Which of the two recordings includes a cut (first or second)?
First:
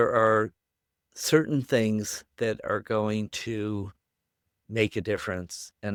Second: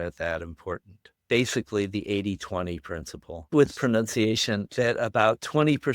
second